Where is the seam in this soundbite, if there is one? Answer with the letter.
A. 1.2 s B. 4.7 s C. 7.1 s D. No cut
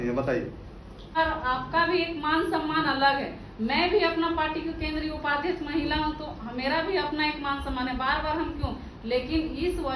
A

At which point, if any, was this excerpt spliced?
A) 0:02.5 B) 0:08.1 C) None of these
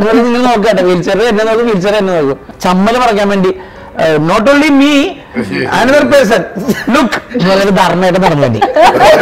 A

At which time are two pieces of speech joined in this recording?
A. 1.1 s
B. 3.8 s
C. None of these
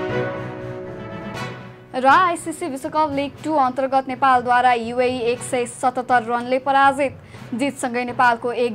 A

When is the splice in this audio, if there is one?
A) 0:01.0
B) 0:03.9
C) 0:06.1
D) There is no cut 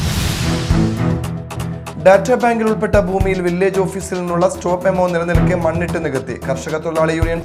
A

